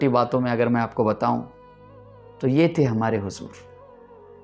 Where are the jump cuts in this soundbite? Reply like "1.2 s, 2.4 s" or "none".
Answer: 3.6 s